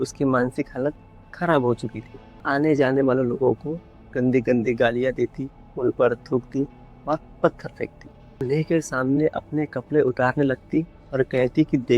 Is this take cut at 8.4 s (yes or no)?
yes